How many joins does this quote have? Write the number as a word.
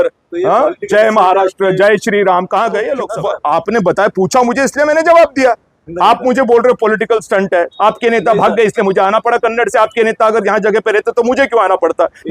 one